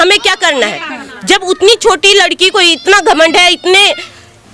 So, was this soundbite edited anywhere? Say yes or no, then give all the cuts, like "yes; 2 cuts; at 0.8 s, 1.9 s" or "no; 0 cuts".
no; 0 cuts